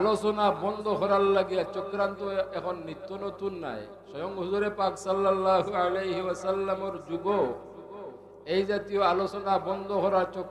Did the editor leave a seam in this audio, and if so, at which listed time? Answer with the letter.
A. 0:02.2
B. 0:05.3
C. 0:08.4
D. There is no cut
D